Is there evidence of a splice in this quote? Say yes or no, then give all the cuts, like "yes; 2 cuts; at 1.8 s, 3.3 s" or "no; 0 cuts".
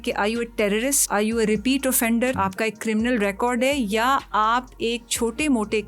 yes; 2 cuts; at 1.0 s, 2.4 s